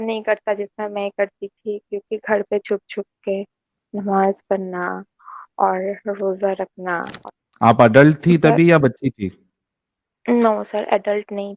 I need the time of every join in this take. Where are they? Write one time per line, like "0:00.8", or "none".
0:07.1